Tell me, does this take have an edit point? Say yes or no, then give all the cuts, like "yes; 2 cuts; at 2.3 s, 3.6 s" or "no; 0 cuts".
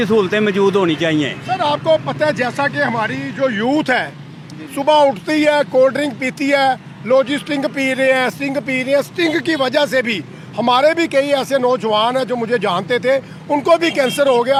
no; 0 cuts